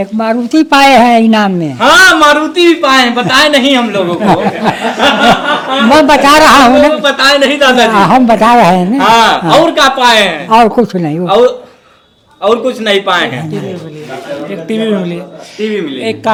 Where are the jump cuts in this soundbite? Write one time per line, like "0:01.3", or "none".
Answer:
none